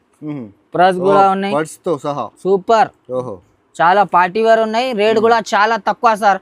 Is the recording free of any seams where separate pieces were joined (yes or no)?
yes